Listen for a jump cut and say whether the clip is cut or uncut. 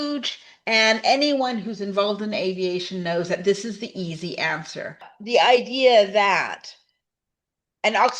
cut